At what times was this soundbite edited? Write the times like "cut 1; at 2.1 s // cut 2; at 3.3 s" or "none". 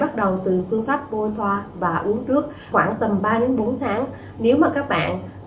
cut 1; at 2.6 s